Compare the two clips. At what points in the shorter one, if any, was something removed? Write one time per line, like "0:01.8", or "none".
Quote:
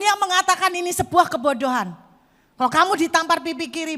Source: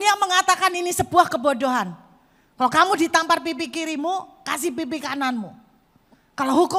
none